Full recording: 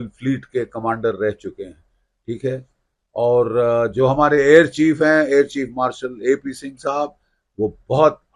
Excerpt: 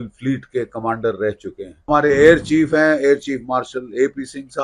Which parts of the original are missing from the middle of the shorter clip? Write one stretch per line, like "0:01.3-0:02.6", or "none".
0:01.9-0:04.2